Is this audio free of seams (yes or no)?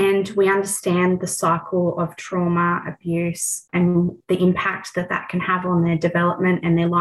yes